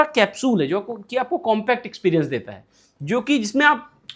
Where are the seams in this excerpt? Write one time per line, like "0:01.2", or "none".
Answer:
none